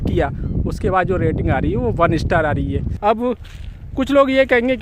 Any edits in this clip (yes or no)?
no